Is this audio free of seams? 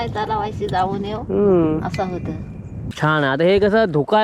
no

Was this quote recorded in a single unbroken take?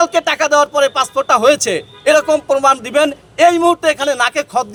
yes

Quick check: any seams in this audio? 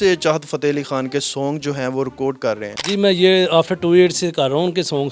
yes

